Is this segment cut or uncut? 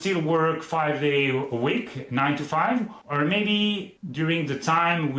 cut